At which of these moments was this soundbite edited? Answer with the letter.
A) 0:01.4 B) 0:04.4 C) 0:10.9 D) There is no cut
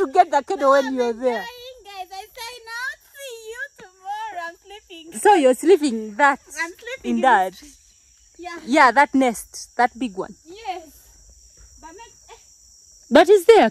D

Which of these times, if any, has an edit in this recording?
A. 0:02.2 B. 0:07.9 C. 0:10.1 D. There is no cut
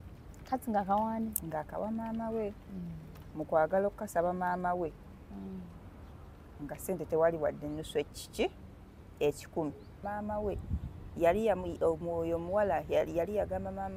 C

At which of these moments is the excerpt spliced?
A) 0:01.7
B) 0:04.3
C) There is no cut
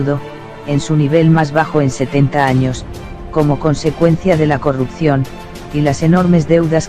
B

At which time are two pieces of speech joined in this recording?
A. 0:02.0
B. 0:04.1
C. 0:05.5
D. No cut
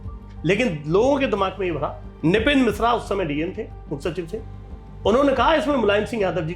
A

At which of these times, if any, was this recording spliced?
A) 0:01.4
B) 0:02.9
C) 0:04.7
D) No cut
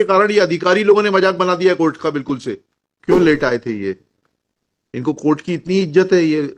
B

